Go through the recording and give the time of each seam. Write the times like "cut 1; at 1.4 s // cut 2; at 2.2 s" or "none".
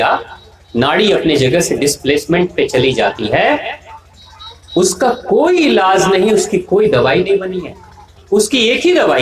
cut 1; at 8.1 s